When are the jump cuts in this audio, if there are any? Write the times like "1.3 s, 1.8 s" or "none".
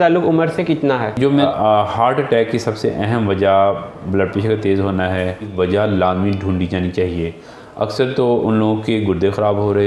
1.4 s, 5.5 s